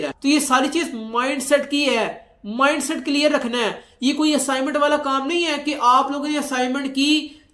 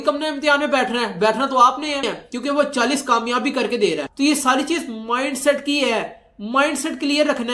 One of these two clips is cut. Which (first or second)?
second